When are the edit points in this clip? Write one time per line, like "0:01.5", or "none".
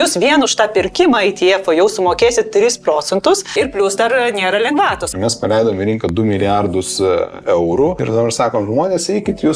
0:03.5
0:05.1
0:08.0